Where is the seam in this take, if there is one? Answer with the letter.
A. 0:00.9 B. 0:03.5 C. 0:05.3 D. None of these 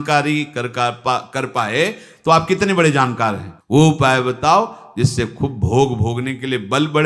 B